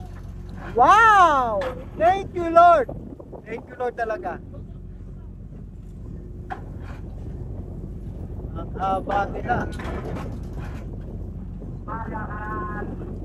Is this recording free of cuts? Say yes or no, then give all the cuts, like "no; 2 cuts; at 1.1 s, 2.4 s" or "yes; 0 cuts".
yes; 0 cuts